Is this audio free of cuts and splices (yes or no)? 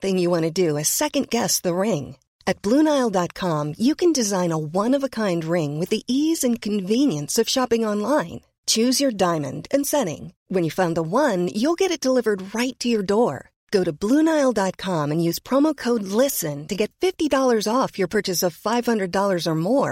yes